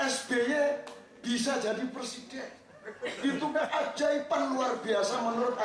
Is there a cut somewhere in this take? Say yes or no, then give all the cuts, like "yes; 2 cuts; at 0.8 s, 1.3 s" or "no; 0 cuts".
no; 0 cuts